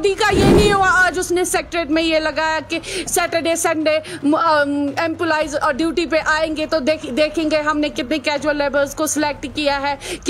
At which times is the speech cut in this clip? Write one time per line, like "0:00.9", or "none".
none